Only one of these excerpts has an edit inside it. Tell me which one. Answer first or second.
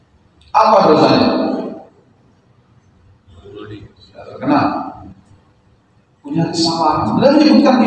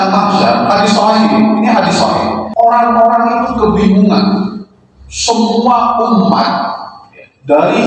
second